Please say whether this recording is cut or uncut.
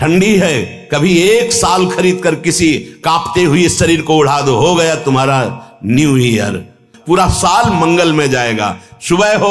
cut